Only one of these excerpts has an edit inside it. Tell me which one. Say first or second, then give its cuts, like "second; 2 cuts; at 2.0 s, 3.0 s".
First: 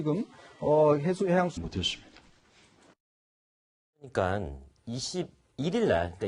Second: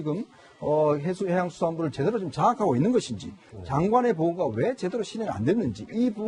second; 1 cut; at 1.5 s